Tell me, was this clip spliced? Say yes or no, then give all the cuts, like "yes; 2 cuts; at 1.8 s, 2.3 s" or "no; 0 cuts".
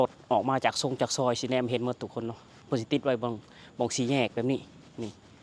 no; 0 cuts